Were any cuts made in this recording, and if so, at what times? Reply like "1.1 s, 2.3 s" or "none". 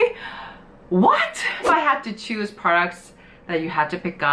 1.7 s

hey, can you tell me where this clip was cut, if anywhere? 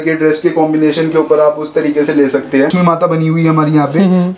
2.7 s

